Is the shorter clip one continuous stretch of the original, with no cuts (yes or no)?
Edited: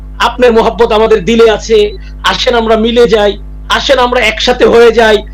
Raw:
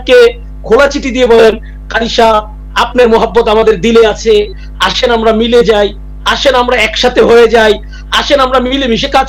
yes